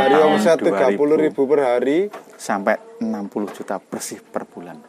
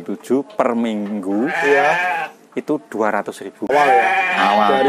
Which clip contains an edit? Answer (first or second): second